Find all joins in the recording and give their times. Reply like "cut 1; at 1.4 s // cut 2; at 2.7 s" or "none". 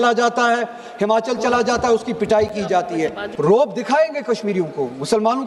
cut 1; at 3.2 s